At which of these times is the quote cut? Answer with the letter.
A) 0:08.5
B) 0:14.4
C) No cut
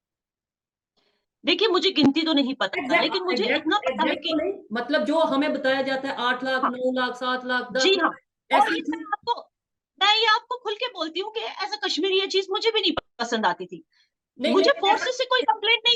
C